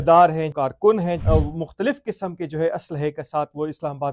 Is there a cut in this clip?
yes; 1 cut; at 0.9 s

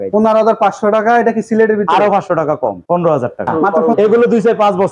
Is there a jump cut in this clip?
yes; 1 cut; at 3.6 s

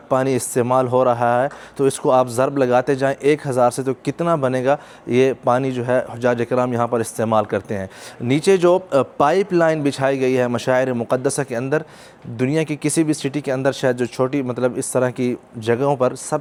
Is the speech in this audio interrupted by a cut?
no; 0 cuts

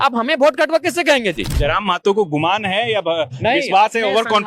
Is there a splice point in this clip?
yes; 1 cut; at 1.5 s

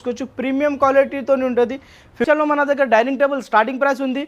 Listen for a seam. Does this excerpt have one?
yes; 1 cut; at 2.3 s

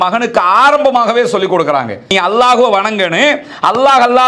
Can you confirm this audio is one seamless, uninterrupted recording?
yes; 0 cuts

